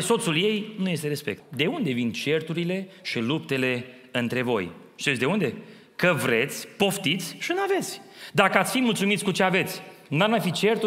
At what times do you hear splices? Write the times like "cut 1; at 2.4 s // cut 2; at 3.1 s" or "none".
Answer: cut 1; at 1.4 s